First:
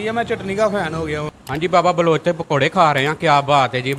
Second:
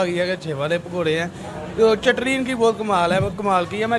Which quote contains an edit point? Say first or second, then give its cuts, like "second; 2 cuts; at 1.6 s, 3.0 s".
first; 1 cut; at 1.3 s